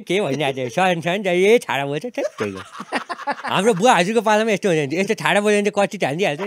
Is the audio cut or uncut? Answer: uncut